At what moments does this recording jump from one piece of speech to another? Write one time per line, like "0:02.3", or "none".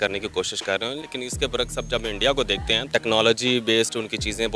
0:02.8